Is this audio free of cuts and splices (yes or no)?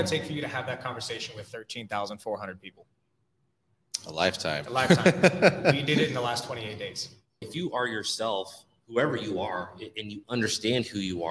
no